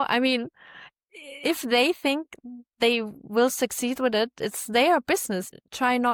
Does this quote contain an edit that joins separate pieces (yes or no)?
no